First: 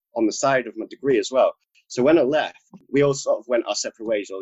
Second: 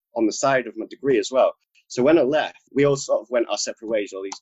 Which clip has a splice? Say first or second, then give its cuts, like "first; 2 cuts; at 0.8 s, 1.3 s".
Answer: second; 1 cut; at 2.6 s